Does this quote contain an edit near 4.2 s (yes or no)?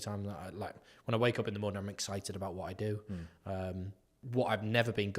yes